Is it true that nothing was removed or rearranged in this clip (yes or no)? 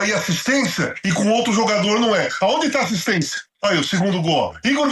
no